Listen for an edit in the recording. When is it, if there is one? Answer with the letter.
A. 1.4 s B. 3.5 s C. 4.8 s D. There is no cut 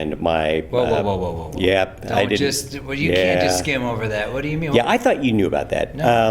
A